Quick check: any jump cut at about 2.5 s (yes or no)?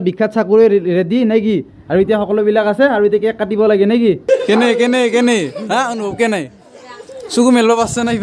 no